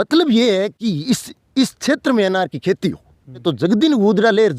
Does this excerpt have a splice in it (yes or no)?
yes